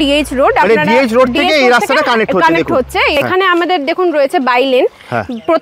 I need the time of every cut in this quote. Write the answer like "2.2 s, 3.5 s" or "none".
3.2 s